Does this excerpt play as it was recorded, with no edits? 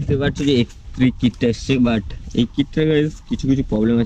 yes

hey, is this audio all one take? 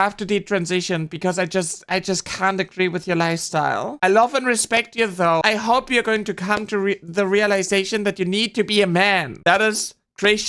no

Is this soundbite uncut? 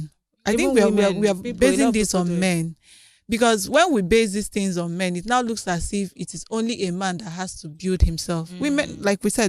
yes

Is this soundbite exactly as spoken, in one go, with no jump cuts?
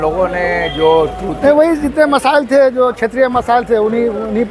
no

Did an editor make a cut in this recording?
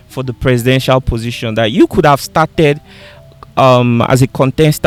no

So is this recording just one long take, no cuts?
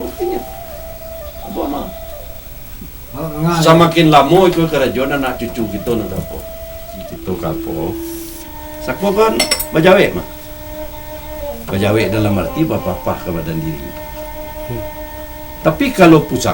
no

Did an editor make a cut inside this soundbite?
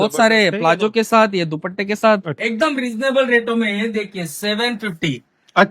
yes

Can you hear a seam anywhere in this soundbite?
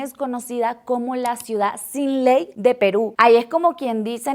no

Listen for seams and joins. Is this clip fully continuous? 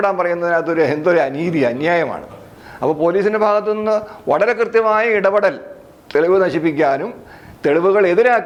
yes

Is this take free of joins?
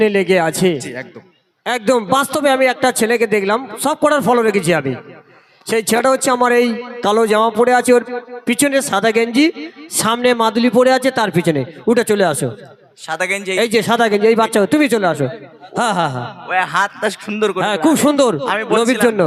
yes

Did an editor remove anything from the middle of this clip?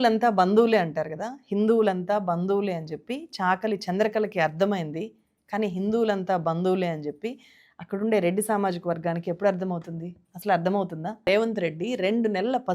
yes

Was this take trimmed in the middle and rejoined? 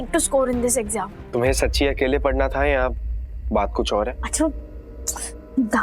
yes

